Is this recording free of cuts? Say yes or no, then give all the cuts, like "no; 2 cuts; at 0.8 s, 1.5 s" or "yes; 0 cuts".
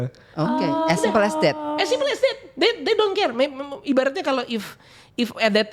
yes; 0 cuts